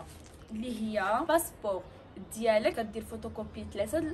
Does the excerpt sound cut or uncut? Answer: cut